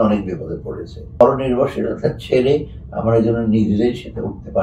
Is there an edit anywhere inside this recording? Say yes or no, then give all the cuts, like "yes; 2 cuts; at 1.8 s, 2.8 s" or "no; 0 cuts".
yes; 1 cut; at 1.2 s